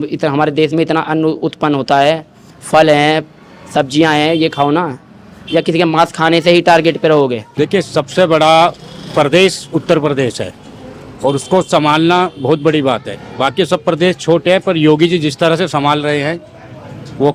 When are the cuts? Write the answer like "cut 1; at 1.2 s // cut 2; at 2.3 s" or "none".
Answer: cut 1; at 7.5 s